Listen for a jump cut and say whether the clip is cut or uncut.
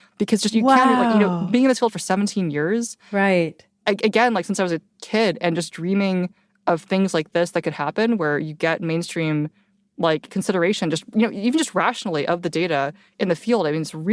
uncut